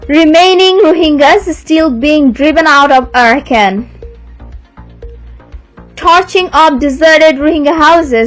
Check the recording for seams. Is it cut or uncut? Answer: uncut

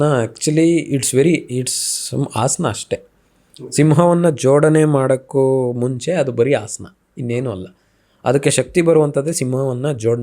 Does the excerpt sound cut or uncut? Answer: uncut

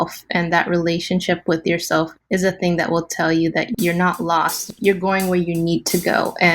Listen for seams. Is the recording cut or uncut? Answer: cut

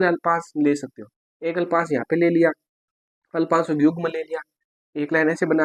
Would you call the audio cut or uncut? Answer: uncut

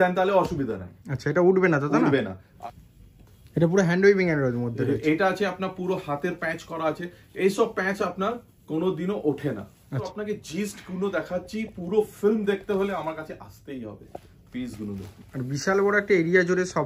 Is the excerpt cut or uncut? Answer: cut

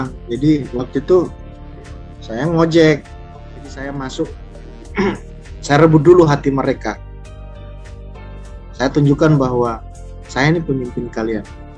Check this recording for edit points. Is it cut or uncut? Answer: cut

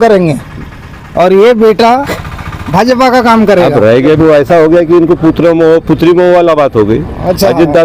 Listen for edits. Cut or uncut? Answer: cut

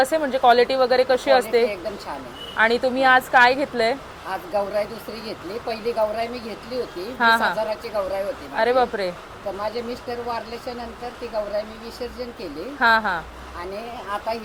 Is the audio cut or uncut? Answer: uncut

